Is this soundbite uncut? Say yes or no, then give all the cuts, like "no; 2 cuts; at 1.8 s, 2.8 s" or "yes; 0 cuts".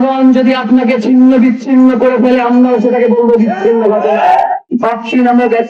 no; 1 cut; at 4.6 s